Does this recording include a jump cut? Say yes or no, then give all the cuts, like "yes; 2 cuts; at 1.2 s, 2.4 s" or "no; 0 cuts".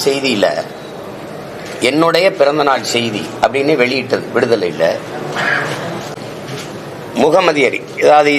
yes; 1 cut; at 6.1 s